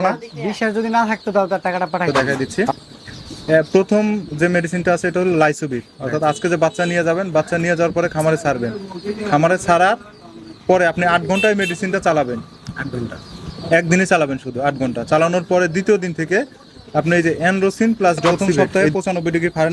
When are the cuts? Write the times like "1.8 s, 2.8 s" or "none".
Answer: 2.1 s, 18.5 s